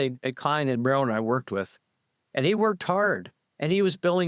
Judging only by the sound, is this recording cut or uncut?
uncut